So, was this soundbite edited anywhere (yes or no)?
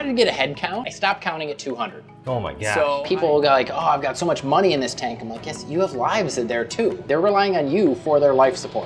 yes